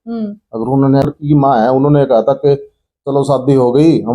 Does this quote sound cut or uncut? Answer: cut